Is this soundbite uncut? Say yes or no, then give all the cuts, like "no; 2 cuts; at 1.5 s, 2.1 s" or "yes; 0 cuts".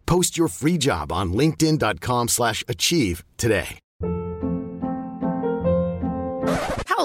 no; 1 cut; at 3.8 s